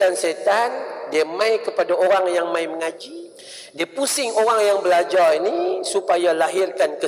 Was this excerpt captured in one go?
no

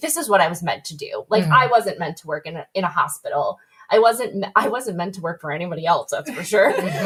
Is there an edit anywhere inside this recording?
no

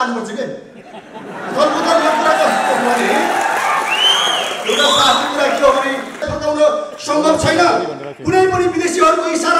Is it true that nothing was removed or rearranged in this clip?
no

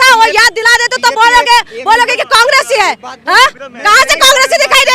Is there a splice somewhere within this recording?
no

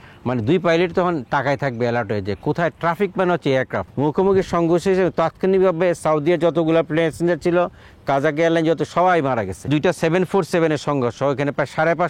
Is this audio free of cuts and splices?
no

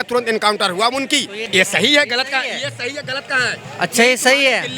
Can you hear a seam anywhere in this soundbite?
yes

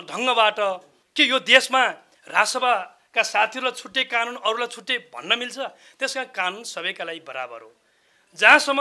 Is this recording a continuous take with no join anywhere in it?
no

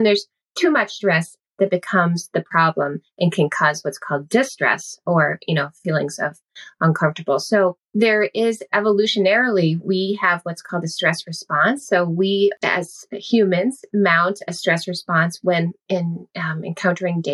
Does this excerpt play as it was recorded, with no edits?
no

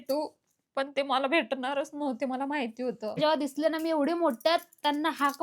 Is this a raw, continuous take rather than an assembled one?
no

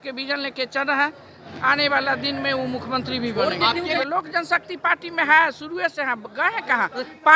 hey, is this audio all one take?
no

